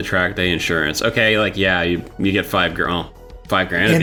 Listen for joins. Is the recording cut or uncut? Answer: uncut